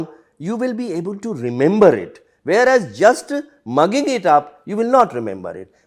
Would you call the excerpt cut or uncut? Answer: uncut